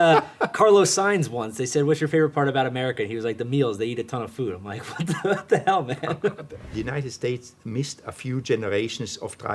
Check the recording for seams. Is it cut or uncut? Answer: cut